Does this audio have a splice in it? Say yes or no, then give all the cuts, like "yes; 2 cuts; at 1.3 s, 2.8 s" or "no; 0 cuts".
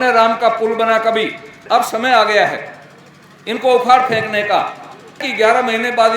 yes; 2 cuts; at 1.5 s, 5.2 s